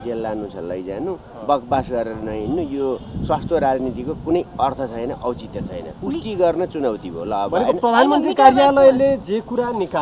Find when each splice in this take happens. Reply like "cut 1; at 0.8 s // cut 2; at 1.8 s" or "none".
none